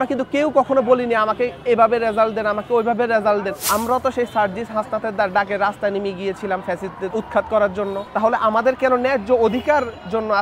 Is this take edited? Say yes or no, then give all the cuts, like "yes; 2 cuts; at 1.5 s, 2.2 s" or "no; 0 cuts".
yes; 3 cuts; at 3.6 s, 7.1 s, 8.0 s